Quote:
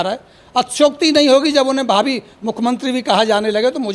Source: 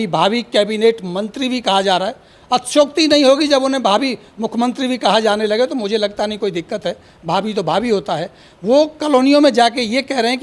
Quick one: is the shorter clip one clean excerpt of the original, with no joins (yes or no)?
yes